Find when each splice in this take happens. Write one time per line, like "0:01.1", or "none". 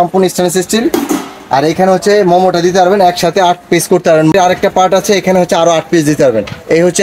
0:04.3